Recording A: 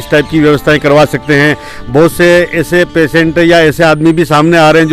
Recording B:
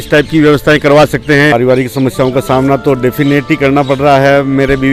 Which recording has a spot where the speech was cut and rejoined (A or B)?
B